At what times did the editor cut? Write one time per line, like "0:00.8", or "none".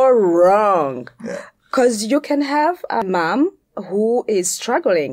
0:03.0